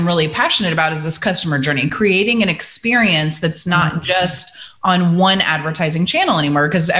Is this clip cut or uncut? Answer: uncut